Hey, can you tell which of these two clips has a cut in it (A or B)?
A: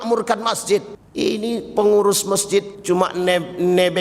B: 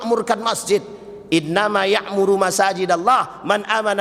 A